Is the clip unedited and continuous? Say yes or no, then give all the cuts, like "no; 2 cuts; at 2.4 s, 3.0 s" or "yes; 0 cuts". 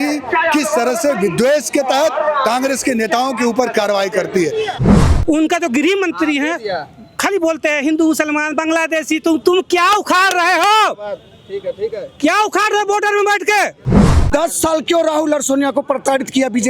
no; 2 cuts; at 4.7 s, 14.3 s